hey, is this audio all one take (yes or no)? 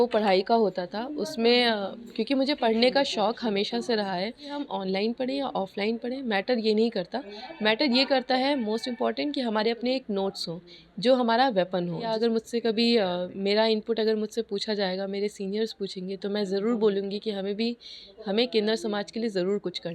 no